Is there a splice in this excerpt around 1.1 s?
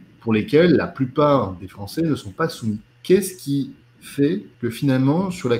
no; 2 cuts; at 2.9 s, 4.5 s

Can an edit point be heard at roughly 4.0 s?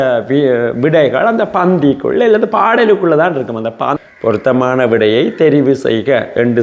yes; 1 cut; at 4.0 s

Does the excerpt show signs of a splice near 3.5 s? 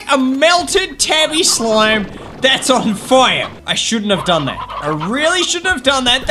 yes; 1 cut; at 3.5 s

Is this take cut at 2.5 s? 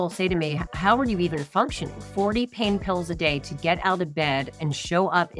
no; 0 cuts

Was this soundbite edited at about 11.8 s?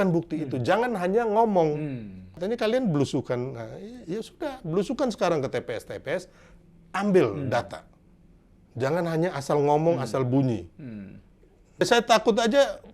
yes; 2 cuts; at 2.2 s, 11.8 s

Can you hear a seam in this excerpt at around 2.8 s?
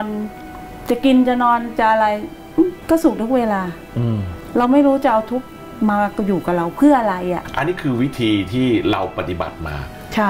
yes; 3 cuts; at 2.8 s, 4.3 s, 7.4 s

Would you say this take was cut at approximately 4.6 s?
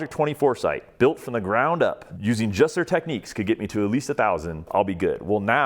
yes; 2 cuts; at 2.1 s, 4.6 s

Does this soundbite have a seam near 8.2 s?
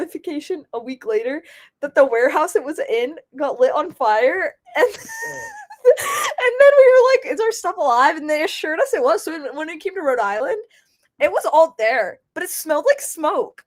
no; 0 cuts

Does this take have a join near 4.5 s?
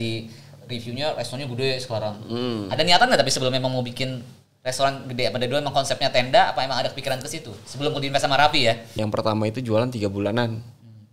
no; 1 cut; at 8.9 s

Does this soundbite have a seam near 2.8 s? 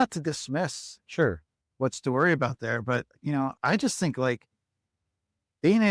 no; 0 cuts

